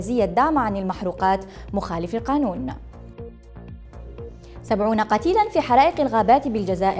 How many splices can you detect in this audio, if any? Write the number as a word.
two